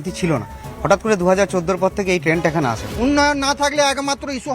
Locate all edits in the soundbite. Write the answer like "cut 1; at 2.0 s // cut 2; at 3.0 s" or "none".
cut 1; at 2.9 s